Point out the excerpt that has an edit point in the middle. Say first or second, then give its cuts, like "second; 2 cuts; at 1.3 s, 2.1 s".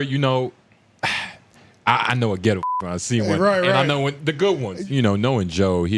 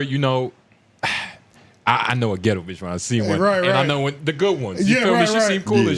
first; 1 cut; at 4.7 s